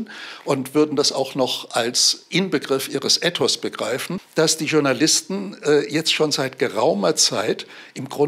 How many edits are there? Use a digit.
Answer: 1